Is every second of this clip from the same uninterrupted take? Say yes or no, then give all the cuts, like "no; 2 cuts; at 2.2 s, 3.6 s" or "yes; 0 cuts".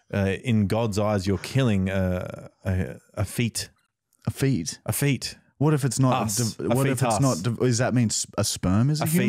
yes; 0 cuts